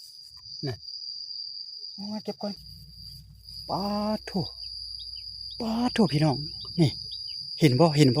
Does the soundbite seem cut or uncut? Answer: cut